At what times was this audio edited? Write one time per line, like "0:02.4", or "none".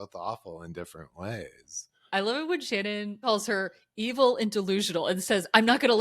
0:02.0
0:03.2